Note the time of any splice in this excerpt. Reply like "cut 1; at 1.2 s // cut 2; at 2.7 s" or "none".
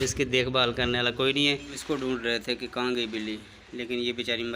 cut 1; at 1.8 s